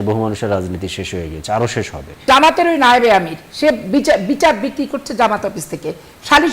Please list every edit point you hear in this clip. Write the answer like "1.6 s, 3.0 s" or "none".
2.2 s